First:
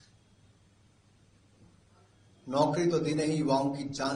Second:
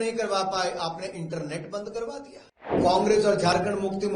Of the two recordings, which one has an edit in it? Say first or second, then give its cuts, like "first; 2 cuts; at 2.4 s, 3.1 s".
second; 1 cut; at 2.8 s